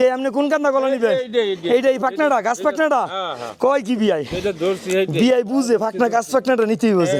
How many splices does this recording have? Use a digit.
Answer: 0